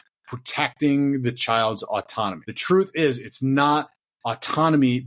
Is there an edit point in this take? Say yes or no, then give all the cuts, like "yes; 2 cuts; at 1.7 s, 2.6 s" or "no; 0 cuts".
yes; 1 cut; at 2.5 s